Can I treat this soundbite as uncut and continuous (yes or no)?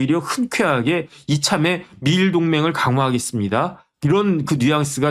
yes